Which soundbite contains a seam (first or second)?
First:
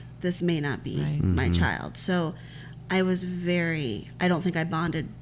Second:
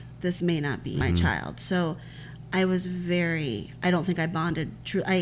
second